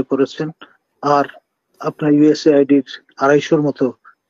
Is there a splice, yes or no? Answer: no